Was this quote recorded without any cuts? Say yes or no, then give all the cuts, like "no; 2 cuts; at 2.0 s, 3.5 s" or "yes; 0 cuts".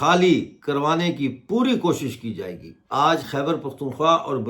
no; 1 cut; at 2.9 s